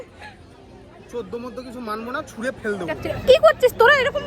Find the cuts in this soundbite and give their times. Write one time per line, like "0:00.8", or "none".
0:03.1